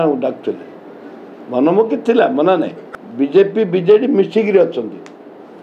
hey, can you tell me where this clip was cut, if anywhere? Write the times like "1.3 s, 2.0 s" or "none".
2.8 s